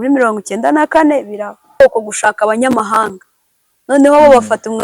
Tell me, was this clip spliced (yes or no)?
yes